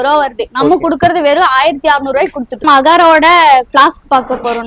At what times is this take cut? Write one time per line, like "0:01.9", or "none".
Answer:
0:02.6